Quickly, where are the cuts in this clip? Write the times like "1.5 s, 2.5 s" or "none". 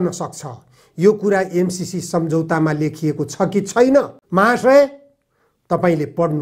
4.2 s

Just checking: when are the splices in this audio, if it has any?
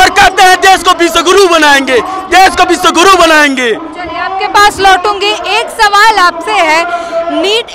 none

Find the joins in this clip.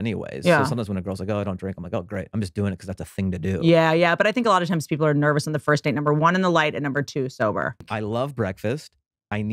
7.9 s

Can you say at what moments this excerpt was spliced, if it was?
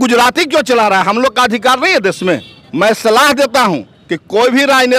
none

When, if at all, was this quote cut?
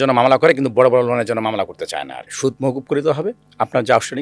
2.3 s

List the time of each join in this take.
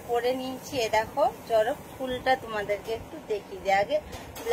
none

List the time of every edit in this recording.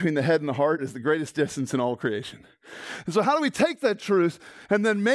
0.9 s

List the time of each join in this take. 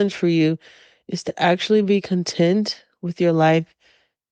none

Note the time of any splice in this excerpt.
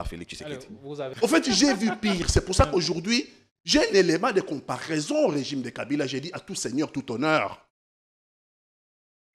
1.0 s

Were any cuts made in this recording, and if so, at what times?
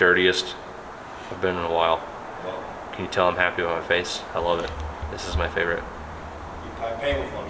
none

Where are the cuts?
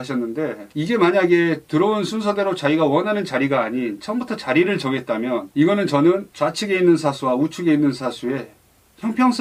none

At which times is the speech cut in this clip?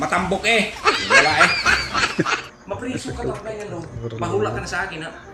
none

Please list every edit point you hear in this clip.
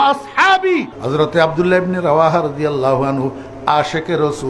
1.0 s

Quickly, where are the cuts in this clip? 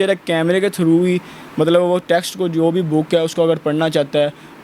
none

